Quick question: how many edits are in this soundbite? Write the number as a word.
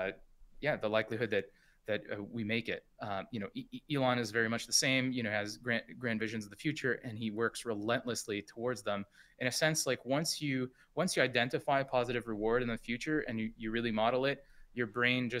zero